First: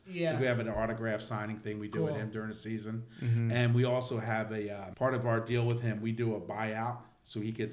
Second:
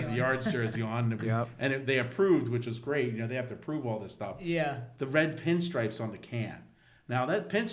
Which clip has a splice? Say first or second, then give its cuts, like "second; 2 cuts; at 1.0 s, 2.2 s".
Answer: first; 1 cut; at 4.8 s